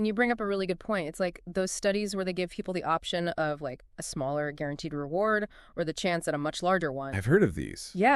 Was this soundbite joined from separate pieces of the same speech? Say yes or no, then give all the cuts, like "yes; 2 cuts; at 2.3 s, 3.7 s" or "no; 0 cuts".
no; 0 cuts